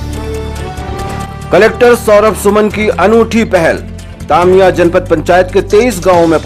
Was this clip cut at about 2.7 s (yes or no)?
no